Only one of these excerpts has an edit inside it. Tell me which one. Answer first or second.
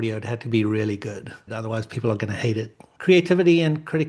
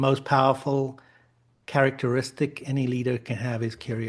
first